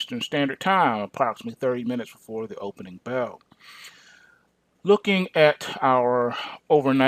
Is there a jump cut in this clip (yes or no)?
no